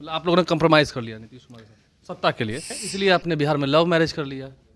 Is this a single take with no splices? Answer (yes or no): no